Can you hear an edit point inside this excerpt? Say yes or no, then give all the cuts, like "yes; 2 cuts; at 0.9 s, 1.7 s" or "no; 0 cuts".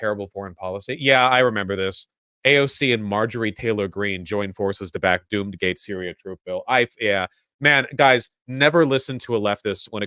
no; 0 cuts